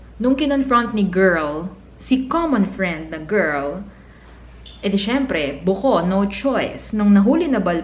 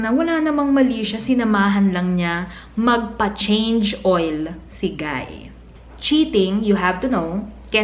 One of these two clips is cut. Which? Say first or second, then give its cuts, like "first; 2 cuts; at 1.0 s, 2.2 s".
second; 1 cut; at 5.6 s